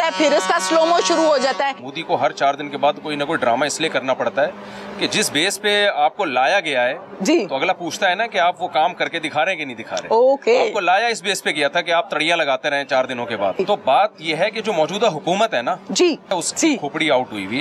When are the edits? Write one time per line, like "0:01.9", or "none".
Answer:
0:01.9
0:13.6
0:16.3